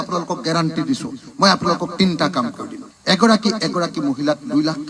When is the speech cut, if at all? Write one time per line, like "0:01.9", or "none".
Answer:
none